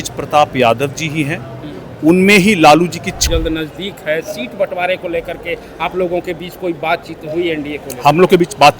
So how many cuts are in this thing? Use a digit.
1